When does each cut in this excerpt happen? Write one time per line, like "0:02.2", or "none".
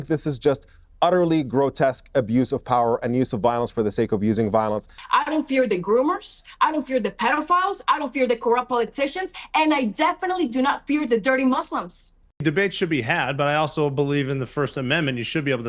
0:04.9
0:12.4